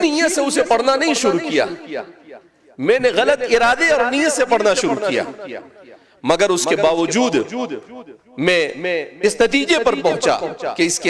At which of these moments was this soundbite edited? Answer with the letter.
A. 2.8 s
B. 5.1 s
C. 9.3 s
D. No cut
D